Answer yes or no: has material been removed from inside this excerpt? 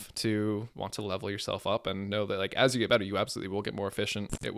no